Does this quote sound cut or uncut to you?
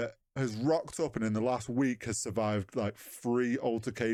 uncut